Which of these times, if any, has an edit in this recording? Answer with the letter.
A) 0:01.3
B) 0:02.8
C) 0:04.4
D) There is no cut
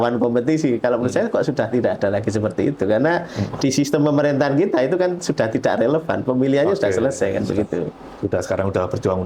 D